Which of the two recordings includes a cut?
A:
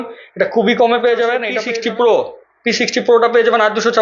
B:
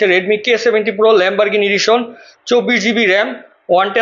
A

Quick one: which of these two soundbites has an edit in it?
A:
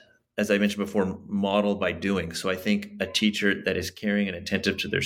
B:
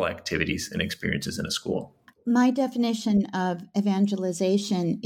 B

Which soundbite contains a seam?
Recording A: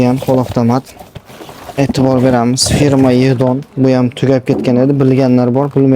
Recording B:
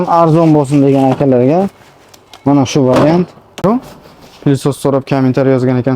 B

